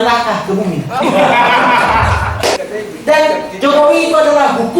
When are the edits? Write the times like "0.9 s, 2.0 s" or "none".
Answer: 2.6 s